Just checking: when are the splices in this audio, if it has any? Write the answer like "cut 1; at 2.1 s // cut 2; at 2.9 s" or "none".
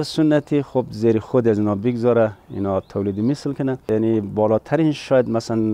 cut 1; at 3.8 s